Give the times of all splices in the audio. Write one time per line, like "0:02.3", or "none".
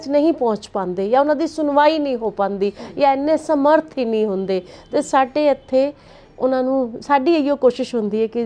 none